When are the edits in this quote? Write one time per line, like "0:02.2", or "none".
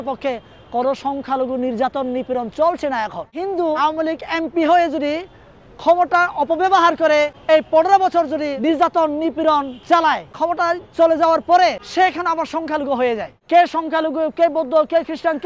0:03.8
0:07.4
0:08.6
0:10.4
0:11.8
0:13.3